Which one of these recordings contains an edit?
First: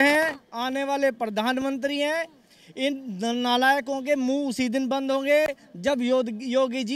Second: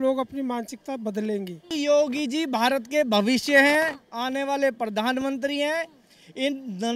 second; 1 cut; at 1.6 s

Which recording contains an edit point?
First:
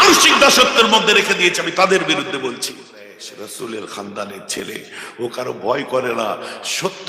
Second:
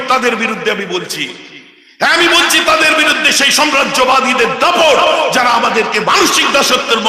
first; 1 cut; at 3.3 s

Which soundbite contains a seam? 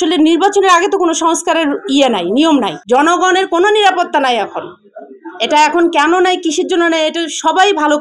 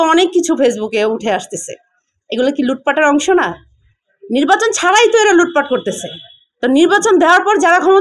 first; 1 cut; at 2.8 s

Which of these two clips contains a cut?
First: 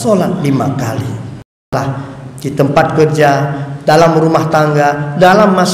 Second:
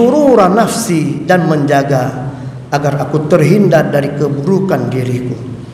first; 1 cut; at 1.7 s

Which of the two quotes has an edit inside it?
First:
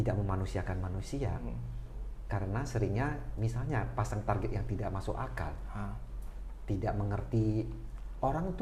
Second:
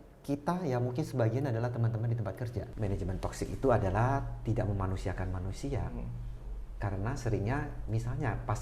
second; 1 cut; at 2.6 s

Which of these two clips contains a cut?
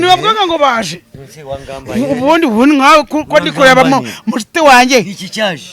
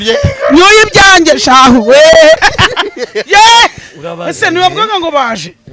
second; 1 cut; at 2.4 s

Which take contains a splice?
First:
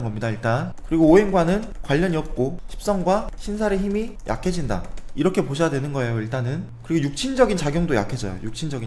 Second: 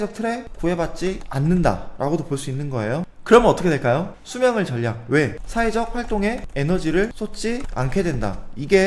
second; 3 cuts; at 3.1 s, 4.1 s, 7.1 s

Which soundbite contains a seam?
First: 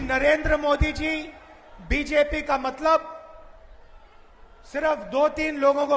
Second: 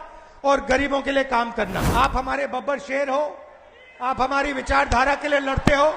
second; 1 cut; at 1.9 s

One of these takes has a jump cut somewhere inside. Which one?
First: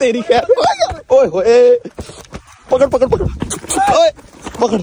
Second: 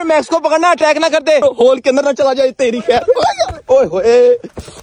second; 1 cut; at 1.4 s

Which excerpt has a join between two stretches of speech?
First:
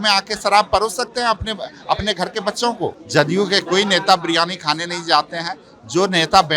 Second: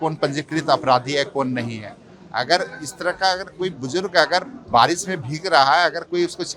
first; 1 cut; at 3.0 s

